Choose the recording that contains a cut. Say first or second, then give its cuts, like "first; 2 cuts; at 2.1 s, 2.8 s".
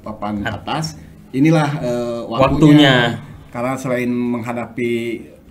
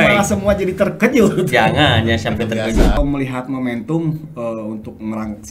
second; 1 cut; at 3.0 s